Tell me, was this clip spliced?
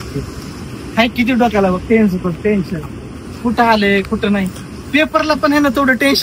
no; 0 cuts

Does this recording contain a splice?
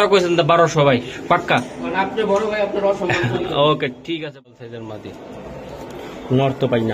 yes; 1 cut; at 4.5 s

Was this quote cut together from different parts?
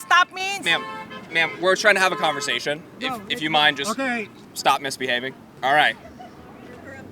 yes; 3 cuts; at 3.0 s, 4.4 s, 5.5 s

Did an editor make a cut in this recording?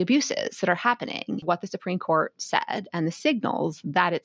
yes; 1 cut; at 1.4 s

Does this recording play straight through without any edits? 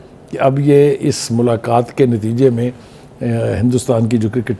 yes; 0 cuts

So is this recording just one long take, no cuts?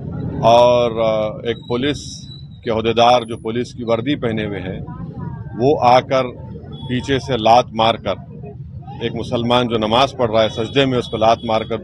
yes; 0 cuts

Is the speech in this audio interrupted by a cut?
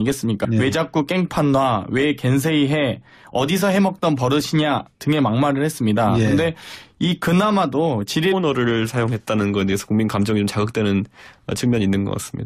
no; 0 cuts

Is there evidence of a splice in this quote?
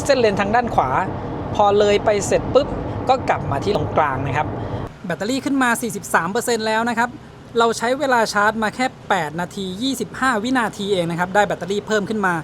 yes; 2 cuts; at 3.7 s, 4.8 s

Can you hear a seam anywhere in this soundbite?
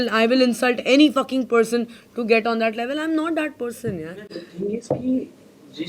no; 0 cuts

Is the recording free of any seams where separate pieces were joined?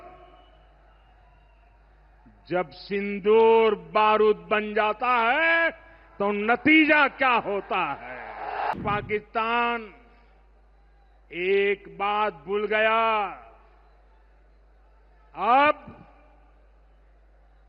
no; 1 cut; at 8.7 s

